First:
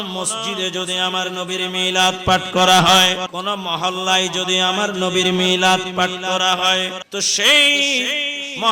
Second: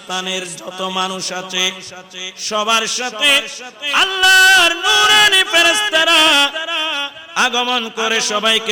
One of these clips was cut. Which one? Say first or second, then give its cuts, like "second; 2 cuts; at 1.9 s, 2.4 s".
first; 2 cuts; at 3.2 s, 7.0 s